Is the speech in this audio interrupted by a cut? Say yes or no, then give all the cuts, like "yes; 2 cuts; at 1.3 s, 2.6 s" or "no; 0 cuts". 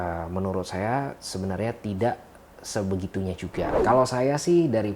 yes; 1 cut; at 3.7 s